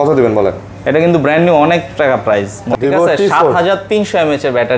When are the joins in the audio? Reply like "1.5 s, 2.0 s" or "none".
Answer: 2.6 s